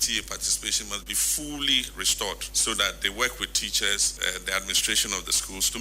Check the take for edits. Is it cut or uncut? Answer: cut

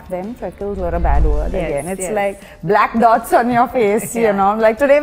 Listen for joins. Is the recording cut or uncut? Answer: uncut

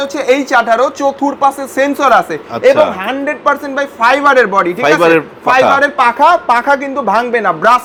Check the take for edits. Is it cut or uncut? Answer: uncut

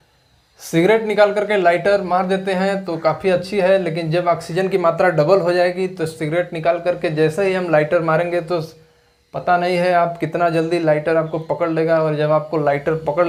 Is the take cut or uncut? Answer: uncut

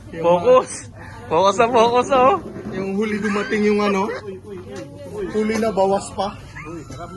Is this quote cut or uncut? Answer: uncut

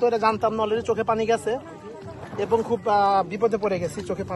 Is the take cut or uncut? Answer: uncut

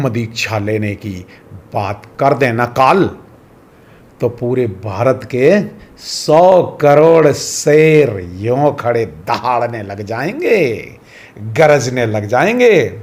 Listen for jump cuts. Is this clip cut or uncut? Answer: uncut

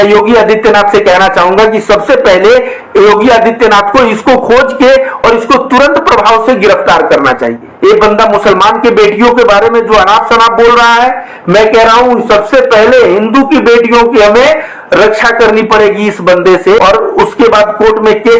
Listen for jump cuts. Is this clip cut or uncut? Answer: cut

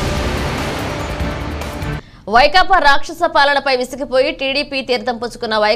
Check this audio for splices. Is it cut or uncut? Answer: cut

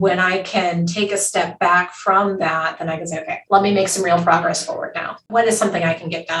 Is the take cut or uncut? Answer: cut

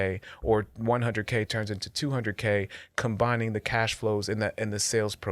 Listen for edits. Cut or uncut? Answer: uncut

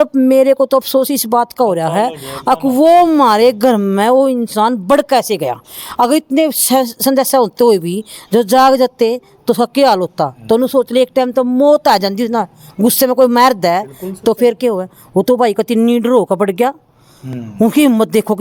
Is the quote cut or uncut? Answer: uncut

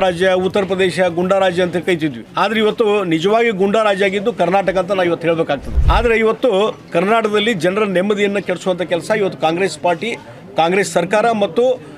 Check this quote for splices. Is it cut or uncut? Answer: cut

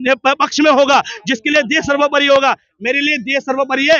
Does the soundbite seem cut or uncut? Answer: uncut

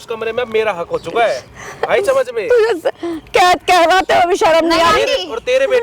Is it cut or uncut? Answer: uncut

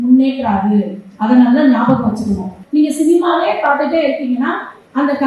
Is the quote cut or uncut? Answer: cut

